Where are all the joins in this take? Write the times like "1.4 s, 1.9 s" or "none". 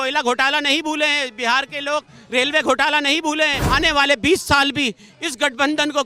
3.6 s